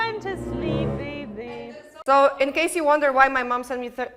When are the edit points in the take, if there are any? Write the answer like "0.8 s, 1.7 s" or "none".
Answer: 2.0 s

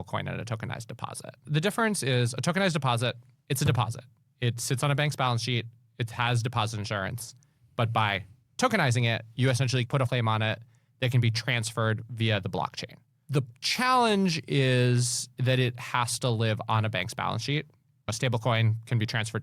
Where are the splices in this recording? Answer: 1.4 s, 10.1 s, 13.3 s, 18.1 s

